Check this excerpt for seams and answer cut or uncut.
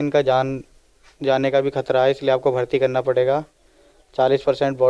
uncut